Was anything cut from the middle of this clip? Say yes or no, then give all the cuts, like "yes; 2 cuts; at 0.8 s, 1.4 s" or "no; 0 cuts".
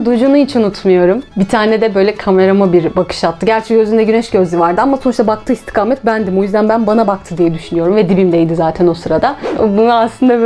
yes; 2 cuts; at 1.2 s, 9.5 s